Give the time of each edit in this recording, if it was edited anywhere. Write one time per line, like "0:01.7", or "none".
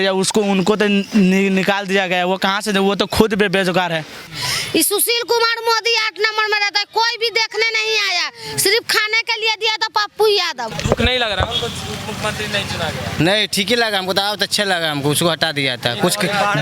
0:04.2
0:10.7